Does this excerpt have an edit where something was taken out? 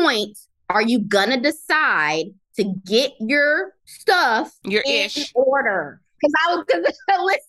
no; 0 cuts

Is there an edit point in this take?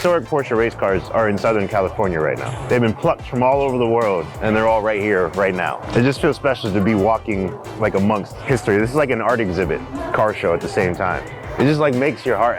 yes; 6 cuts; at 2.5 s, 4.3 s, 5.8 s, 8.3 s, 9.9 s, 11.4 s

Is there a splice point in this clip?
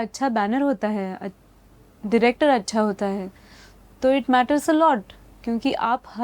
no; 0 cuts

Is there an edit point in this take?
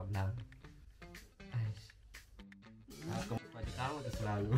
no; 0 cuts

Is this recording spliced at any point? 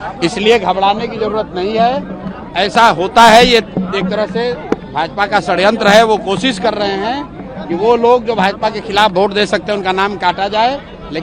no; 0 cuts

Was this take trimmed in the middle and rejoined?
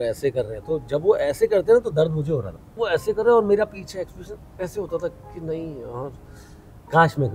yes; 1 cut; at 2.8 s

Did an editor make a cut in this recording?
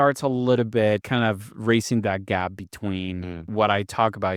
yes; 2 cuts; at 1.1 s, 3.5 s

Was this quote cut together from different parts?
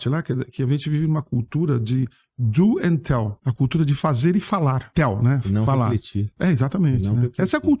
yes; 2 cuts; at 3.4 s, 4.9 s

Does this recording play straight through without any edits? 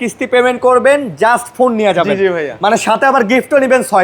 yes; 0 cuts

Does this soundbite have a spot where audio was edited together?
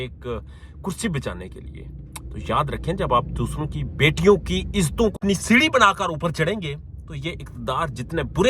yes; 1 cut; at 5.1 s

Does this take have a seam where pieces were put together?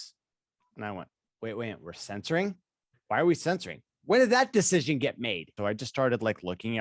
yes; 1 cut; at 5.5 s

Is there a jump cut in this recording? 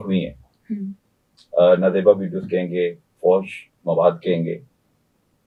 no; 0 cuts

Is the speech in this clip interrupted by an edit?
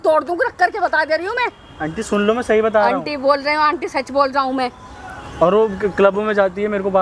no; 0 cuts

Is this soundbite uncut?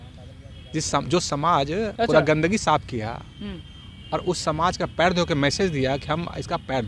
yes; 0 cuts

